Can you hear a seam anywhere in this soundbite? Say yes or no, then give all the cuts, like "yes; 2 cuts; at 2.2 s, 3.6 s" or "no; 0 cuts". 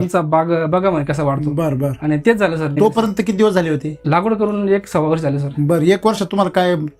yes; 2 cuts; at 2.7 s, 4.0 s